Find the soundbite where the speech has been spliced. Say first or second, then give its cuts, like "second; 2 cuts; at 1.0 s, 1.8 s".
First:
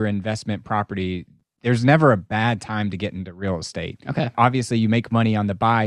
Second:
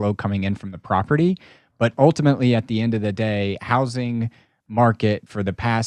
first; 1 cut; at 4.3 s